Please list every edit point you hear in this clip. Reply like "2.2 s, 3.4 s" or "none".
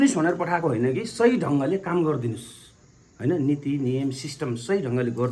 none